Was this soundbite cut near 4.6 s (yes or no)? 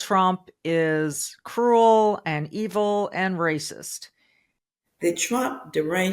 yes